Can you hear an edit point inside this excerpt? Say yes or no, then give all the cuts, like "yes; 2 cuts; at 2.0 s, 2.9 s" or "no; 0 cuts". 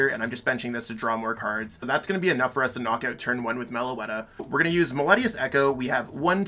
yes; 2 cuts; at 1.8 s, 4.5 s